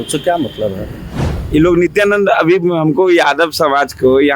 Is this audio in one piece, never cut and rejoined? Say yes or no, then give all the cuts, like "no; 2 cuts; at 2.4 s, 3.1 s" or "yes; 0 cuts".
no; 1 cut; at 1.2 s